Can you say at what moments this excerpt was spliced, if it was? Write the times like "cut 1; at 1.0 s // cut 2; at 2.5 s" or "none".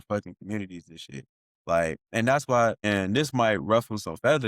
cut 1; at 2.8 s